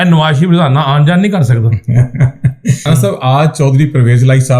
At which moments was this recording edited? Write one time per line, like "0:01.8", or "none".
0:02.8